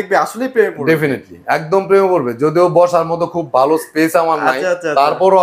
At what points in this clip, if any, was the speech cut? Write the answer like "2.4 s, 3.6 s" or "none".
none